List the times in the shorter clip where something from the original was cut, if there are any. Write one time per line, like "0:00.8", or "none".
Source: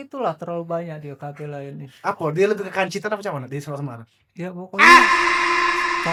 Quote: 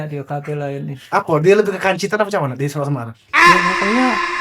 0:03.2